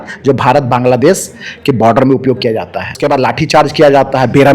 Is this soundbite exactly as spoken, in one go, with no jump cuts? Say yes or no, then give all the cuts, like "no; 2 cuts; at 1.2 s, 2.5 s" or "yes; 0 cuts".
no; 1 cut; at 3.0 s